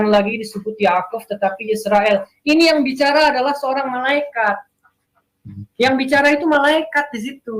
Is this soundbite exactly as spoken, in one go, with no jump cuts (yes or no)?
yes